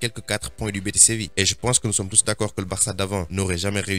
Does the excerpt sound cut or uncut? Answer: cut